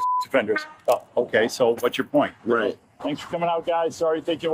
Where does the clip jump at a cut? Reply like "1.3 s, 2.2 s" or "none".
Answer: 2.9 s